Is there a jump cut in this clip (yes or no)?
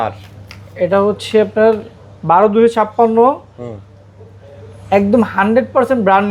no